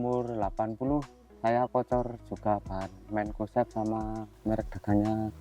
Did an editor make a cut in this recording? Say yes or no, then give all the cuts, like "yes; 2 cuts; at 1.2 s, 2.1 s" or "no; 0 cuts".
yes; 1 cut; at 4.3 s